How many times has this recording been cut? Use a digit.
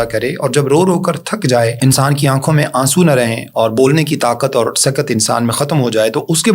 1